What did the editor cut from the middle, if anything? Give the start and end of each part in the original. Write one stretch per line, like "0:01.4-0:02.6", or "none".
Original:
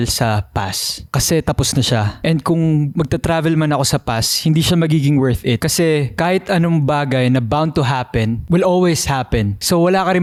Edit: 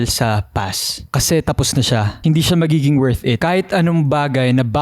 0:02.1-0:04.3
0:05.6-0:06.1

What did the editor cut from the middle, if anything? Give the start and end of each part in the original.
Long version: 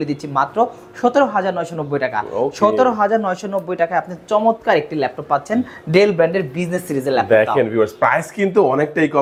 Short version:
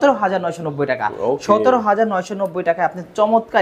none

